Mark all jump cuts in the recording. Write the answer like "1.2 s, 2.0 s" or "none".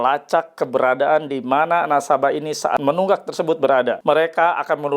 2.8 s, 4.0 s